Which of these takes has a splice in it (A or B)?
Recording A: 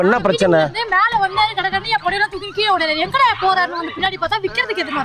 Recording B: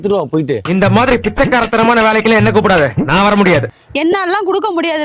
B